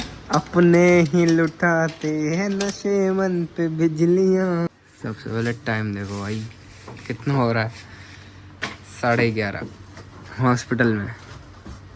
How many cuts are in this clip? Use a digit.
1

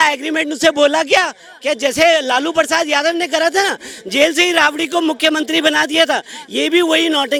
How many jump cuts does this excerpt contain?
0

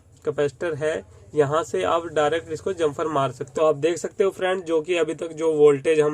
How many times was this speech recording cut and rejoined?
1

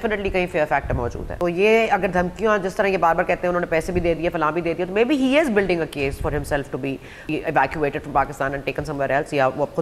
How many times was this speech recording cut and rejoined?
2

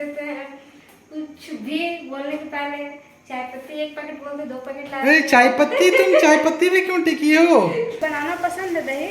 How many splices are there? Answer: 1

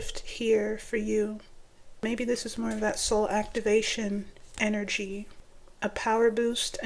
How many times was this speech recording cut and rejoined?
2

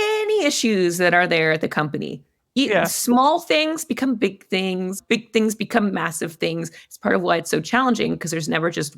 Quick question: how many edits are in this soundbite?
1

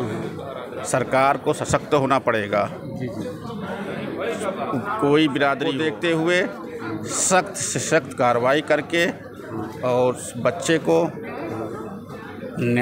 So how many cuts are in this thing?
1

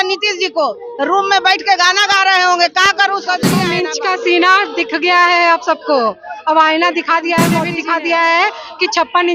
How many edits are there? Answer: 2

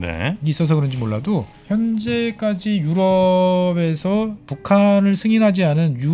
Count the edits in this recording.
2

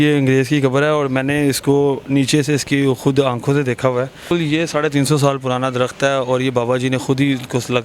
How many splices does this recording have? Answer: 1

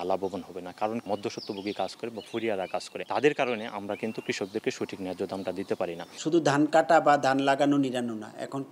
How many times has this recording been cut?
3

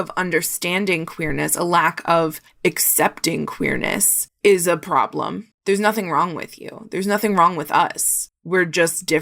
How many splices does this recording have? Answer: 1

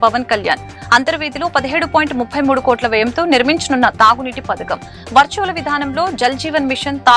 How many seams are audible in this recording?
0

